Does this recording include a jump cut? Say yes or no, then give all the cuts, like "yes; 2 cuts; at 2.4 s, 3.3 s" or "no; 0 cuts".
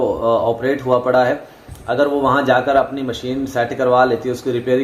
no; 0 cuts